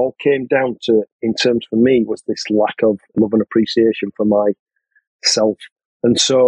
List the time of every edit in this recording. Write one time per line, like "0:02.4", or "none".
0:03.1